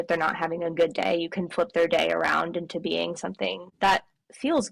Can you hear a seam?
yes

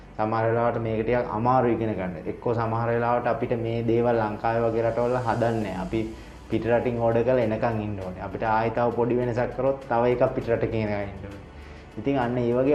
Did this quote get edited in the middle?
no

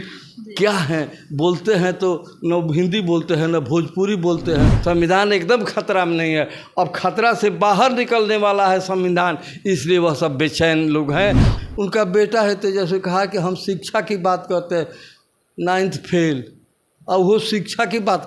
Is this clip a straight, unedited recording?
no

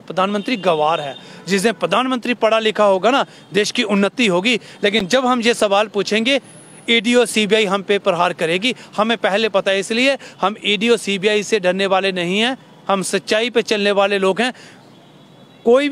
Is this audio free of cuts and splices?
yes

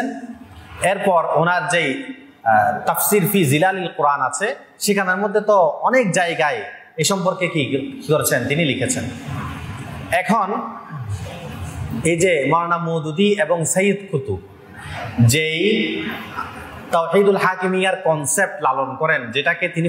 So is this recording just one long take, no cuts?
yes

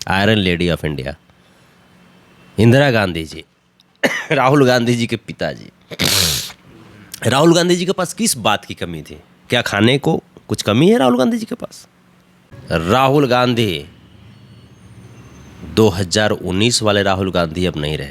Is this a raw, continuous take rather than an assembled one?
no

